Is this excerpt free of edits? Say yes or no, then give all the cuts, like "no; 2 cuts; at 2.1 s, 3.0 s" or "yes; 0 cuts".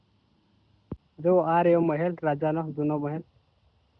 no; 1 cut; at 1.0 s